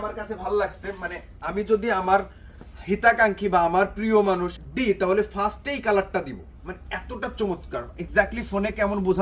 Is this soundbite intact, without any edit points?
no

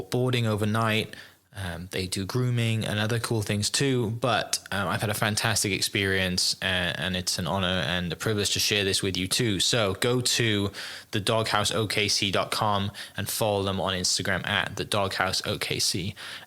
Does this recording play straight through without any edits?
yes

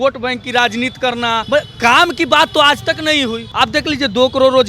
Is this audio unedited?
no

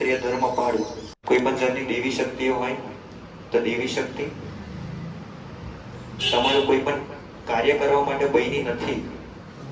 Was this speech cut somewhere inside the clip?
yes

